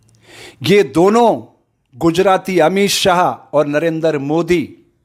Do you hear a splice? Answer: no; 0 cuts

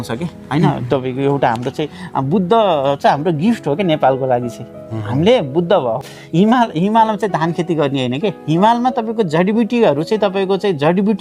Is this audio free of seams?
no; 1 cut; at 6.0 s

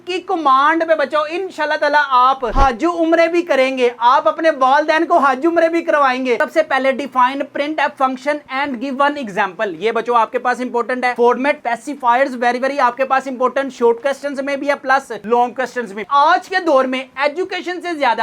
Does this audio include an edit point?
yes; 2 cuts; at 6.4 s, 16.0 s

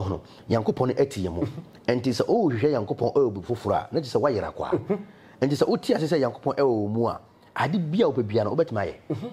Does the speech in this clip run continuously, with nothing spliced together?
yes; 0 cuts

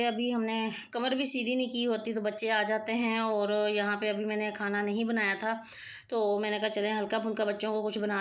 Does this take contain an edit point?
no; 0 cuts

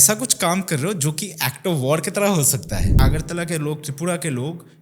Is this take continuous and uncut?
no; 1 cut; at 3.0 s

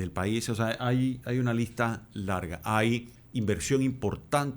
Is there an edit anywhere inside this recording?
yes; 1 cut; at 3.2 s

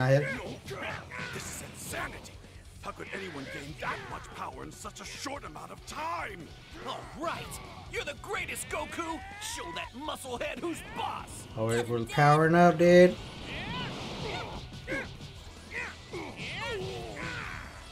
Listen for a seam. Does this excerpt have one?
no; 0 cuts

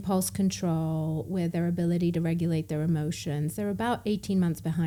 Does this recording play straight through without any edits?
yes; 0 cuts

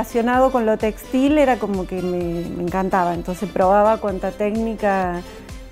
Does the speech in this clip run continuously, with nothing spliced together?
yes; 0 cuts

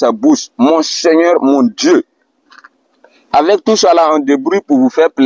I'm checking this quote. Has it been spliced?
no; 0 cuts

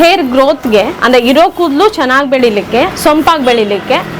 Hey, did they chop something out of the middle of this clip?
yes; 2 cuts; at 0.9 s, 2.9 s

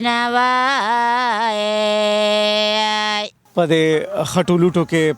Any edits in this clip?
yes; 1 cut; at 3.3 s

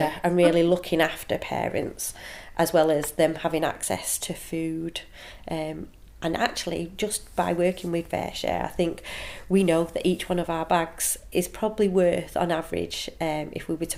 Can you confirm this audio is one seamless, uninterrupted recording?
yes; 0 cuts

